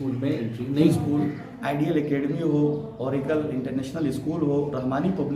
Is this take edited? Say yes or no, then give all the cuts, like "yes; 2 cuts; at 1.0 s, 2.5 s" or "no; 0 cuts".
yes; 1 cut; at 1.0 s